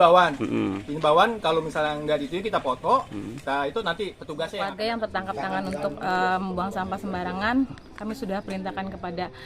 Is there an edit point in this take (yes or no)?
yes